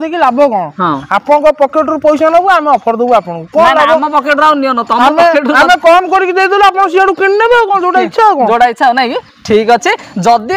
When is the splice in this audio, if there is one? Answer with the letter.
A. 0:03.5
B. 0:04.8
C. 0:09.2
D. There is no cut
D